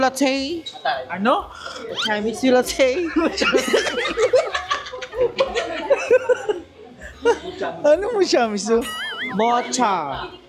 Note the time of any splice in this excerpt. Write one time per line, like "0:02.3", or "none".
none